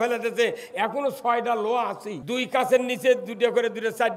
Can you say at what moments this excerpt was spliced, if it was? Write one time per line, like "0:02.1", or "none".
0:02.1